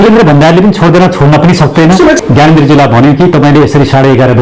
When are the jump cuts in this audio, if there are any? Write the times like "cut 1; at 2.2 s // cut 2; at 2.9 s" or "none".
cut 1; at 2.2 s